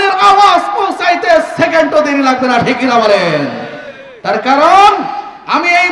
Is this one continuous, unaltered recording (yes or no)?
yes